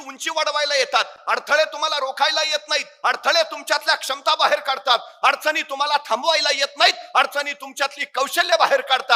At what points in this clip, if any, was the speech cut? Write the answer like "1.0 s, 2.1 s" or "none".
none

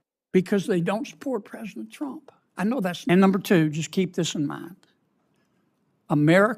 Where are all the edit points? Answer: 3.1 s

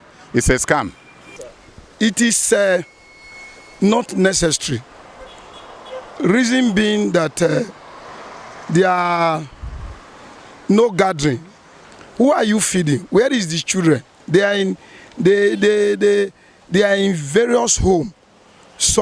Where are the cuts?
none

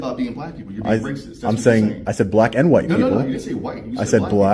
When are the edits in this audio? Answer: none

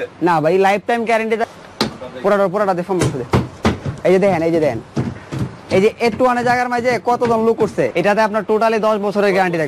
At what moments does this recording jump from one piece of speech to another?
1.4 s, 7.9 s

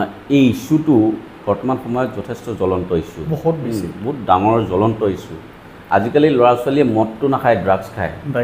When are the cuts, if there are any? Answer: none

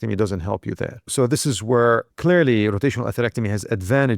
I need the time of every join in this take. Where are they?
1.1 s, 2.1 s

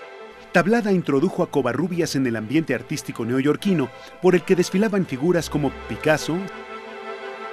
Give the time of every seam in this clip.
2.8 s

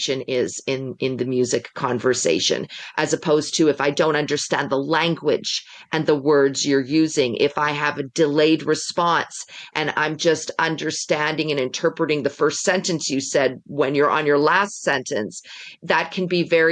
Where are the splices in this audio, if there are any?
none

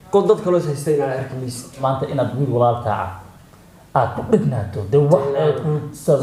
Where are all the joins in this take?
1.8 s

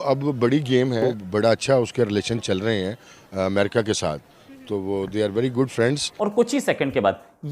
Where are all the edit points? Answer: 1.1 s, 6.1 s

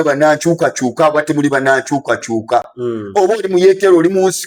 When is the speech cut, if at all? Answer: none

